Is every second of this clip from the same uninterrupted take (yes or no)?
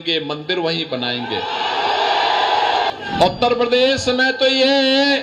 no